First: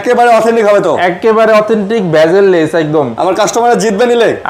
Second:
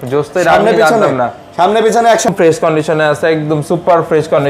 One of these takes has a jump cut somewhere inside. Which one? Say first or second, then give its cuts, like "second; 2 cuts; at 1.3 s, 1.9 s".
second; 1 cut; at 2.3 s